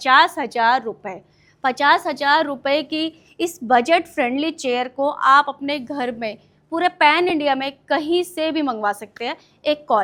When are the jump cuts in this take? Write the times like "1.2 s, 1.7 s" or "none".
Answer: none